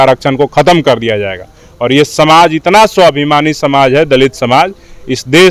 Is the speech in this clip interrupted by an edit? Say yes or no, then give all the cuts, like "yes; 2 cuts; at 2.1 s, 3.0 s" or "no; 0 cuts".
no; 0 cuts